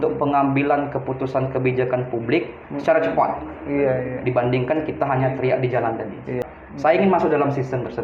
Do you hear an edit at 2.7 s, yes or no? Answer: no